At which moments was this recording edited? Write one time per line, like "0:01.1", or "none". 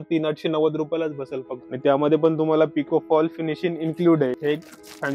0:01.6
0:04.3